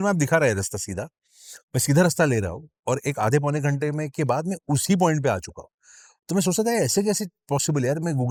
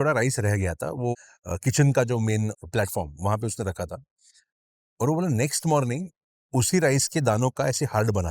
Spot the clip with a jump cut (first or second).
second